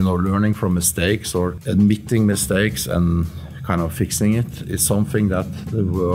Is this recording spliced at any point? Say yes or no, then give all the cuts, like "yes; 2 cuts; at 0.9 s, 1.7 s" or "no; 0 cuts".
yes; 1 cut; at 1.6 s